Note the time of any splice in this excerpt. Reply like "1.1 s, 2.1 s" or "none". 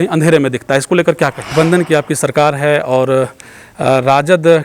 1.5 s